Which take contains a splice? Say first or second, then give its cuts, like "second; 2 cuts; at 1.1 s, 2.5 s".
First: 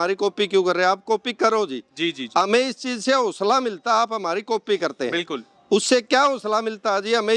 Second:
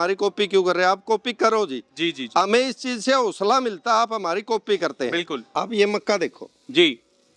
second; 1 cut; at 5.5 s